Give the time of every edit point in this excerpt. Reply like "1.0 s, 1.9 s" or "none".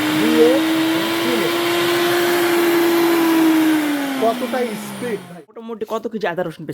5.6 s